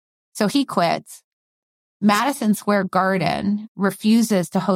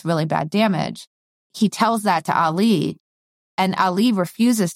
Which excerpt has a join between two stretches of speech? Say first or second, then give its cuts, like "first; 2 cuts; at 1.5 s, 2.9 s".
second; 1 cut; at 1.5 s